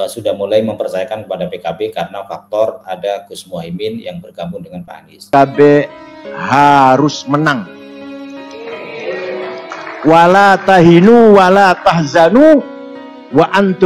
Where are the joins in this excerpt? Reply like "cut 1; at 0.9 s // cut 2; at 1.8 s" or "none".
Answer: cut 1; at 5.3 s